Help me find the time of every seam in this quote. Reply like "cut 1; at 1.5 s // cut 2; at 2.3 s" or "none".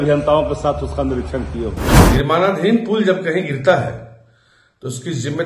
cut 1; at 1.9 s

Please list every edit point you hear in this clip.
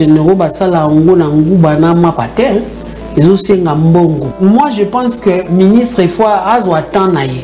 cut 1; at 4.3 s

